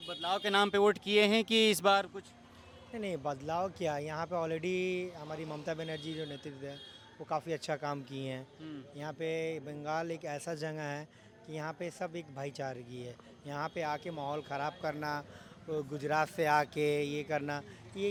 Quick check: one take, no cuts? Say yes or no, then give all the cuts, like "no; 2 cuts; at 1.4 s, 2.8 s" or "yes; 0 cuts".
yes; 0 cuts